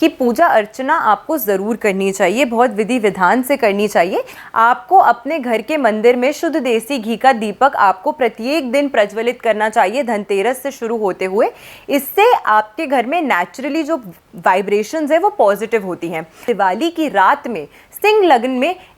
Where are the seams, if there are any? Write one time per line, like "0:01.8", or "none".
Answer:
0:04.3
0:16.4